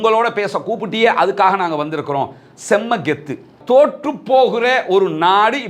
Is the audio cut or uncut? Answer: cut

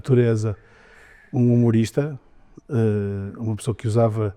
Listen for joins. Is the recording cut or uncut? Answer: uncut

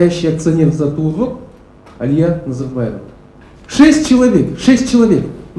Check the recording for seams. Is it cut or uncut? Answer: uncut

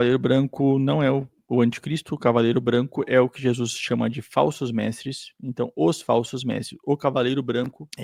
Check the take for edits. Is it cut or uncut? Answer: uncut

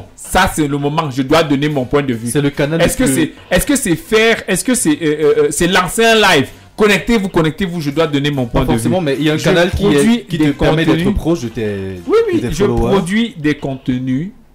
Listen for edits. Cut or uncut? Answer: uncut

